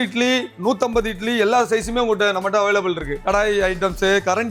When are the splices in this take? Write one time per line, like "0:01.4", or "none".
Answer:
0:03.2